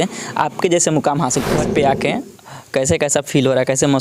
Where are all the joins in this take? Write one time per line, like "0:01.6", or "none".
0:01.5